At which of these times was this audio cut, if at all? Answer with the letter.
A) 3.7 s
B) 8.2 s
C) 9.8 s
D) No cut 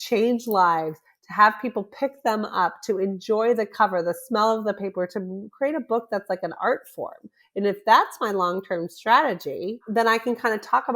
C